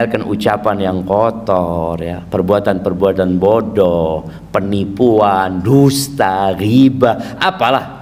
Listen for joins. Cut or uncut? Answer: uncut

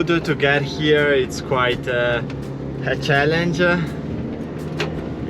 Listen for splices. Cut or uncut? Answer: uncut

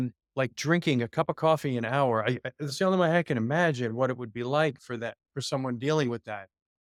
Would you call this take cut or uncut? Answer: uncut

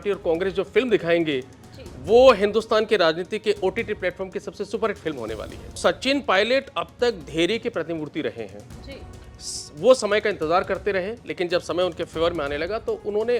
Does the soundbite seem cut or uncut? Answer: cut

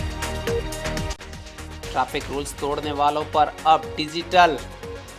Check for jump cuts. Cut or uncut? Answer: cut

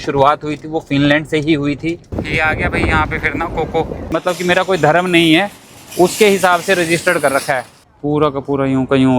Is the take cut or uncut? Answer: cut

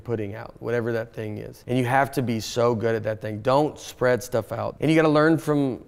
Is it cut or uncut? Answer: cut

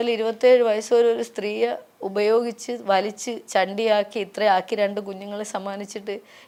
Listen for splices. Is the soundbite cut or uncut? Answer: uncut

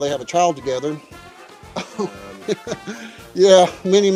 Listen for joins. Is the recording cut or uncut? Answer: uncut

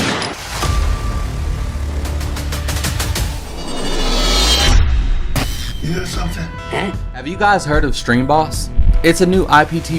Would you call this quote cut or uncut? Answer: cut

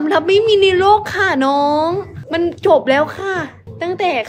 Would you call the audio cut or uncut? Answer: uncut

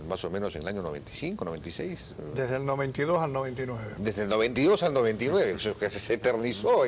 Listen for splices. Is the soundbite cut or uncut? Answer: cut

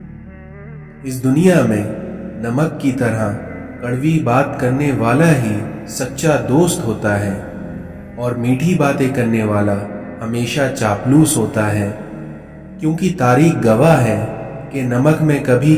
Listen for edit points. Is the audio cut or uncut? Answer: cut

